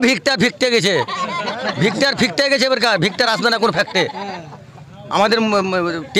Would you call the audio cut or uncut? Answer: uncut